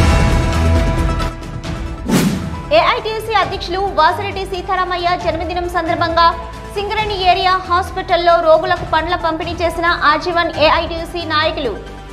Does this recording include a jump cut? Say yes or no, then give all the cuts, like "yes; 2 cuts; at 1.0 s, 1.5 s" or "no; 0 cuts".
yes; 1 cut; at 2.3 s